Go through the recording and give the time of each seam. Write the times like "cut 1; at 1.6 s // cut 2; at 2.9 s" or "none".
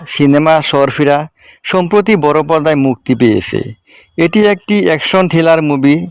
none